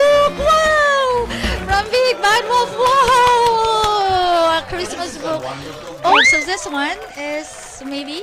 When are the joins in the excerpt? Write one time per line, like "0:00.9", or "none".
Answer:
0:06.2